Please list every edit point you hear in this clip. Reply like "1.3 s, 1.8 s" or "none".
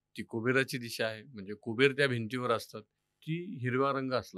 none